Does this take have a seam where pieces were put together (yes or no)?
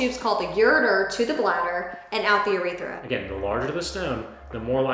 yes